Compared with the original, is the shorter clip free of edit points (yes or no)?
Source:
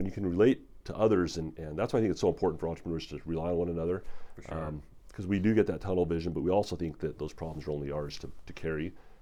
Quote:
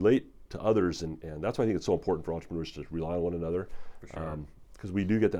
yes